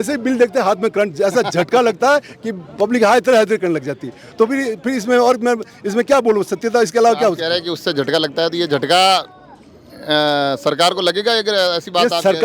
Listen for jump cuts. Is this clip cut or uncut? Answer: uncut